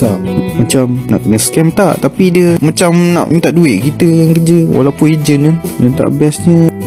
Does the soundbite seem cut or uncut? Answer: uncut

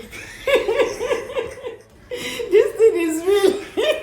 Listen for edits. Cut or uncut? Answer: cut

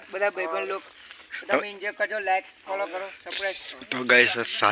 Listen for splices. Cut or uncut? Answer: cut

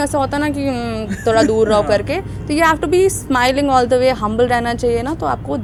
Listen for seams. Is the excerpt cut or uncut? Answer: uncut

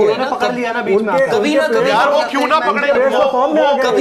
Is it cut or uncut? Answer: uncut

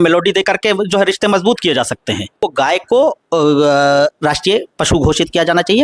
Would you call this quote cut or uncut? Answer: cut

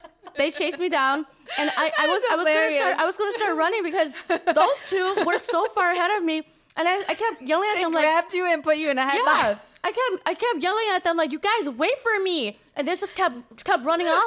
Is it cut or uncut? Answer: uncut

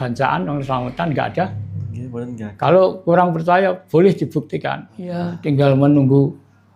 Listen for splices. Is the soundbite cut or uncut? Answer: cut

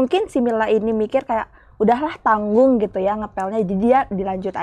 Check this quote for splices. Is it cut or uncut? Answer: uncut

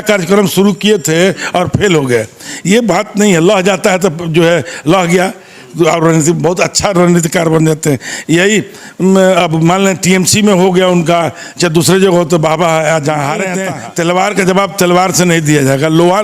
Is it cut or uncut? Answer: cut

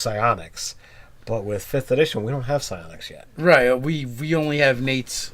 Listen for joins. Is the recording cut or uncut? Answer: cut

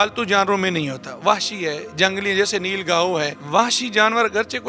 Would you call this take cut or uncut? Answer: cut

